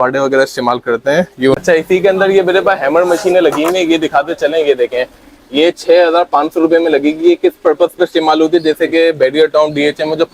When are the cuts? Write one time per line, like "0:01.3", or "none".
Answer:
0:01.6